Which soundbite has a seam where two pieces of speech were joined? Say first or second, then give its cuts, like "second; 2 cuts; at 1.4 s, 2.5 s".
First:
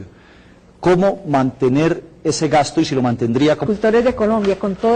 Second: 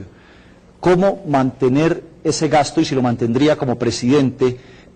second; 1 cut; at 3.6 s